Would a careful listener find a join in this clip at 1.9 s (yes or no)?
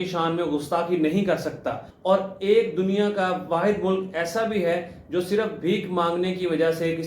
yes